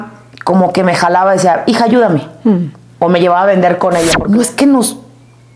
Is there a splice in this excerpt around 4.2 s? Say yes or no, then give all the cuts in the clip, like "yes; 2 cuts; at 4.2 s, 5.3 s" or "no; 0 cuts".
yes; 1 cut; at 4.2 s